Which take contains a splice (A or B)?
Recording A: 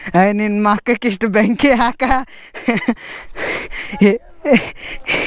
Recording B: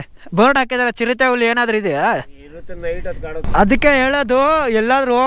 B